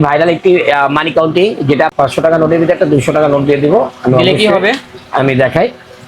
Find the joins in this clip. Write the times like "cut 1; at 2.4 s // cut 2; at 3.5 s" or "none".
cut 1; at 1.9 s